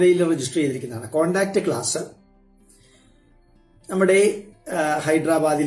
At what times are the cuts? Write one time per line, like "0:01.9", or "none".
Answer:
0:02.2
0:03.8